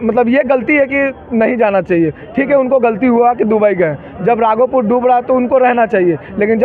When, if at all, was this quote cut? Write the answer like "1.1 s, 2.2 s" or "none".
none